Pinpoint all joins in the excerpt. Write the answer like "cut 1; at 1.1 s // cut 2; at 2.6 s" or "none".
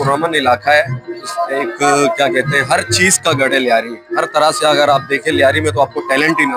none

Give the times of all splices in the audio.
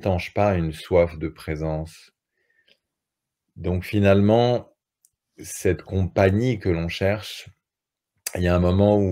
none

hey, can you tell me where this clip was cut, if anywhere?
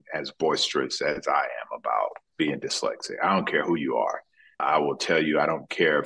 cut 1; at 2.3 s // cut 2; at 4.6 s

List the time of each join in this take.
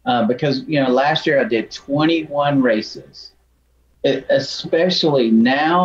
cut 1; at 3.7 s

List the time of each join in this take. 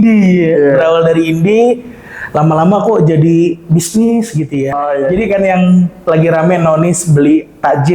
cut 1; at 4.8 s

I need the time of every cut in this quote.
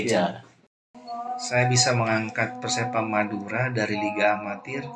cut 1; at 1.0 s

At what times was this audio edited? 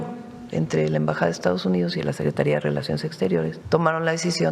cut 1; at 3.6 s

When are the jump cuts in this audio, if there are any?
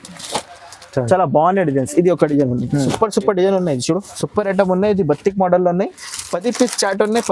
cut 1; at 4.1 s

